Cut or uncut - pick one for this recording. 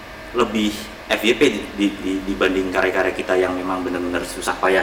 uncut